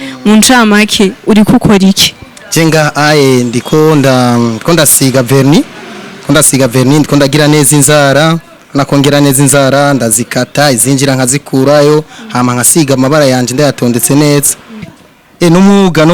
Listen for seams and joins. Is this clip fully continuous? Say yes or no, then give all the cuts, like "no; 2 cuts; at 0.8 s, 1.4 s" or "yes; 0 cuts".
no; 1 cut; at 14.9 s